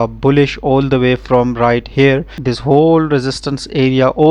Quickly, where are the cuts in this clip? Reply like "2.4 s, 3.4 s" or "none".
2.3 s